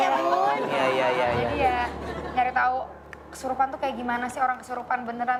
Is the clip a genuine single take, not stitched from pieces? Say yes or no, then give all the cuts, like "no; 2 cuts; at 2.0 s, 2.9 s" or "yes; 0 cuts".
yes; 0 cuts